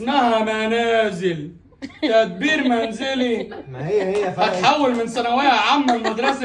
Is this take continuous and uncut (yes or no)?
yes